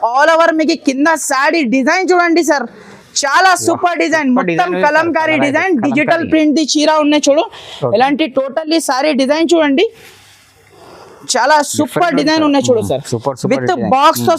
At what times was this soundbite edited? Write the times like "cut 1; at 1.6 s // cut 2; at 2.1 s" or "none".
none